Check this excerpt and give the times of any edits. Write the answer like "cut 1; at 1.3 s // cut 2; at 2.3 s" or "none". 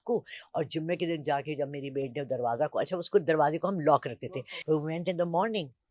cut 1; at 4.1 s